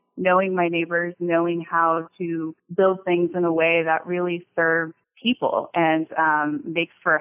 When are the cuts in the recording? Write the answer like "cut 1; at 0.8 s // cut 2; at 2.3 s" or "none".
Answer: cut 1; at 2.6 s // cut 2; at 5.0 s